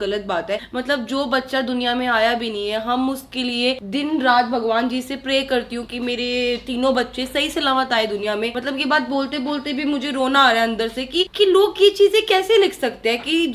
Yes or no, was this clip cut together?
no